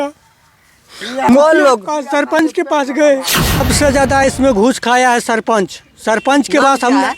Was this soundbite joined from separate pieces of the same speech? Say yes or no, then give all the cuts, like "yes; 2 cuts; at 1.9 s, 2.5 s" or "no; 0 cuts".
yes; 1 cut; at 3.6 s